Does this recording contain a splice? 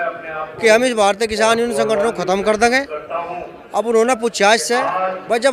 no; 0 cuts

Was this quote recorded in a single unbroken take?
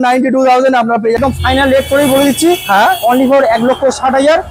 no; 1 cut; at 1.2 s

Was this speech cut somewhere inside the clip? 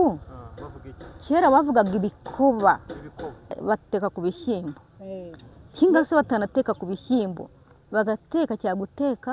yes; 1 cut; at 3.6 s

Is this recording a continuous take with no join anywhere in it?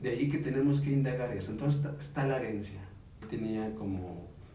no; 1 cut; at 3.1 s

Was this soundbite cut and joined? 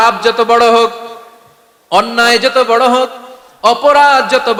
no; 0 cuts

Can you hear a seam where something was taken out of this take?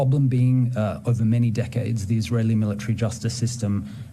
no; 0 cuts

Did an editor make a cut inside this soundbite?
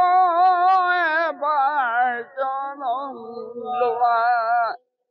no; 0 cuts

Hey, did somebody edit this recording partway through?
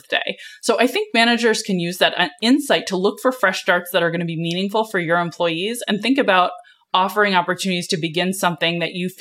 no; 0 cuts

